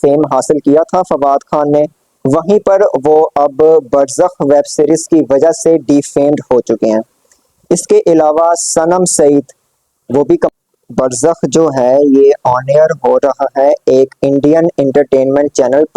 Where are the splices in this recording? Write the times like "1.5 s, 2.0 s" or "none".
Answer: 10.5 s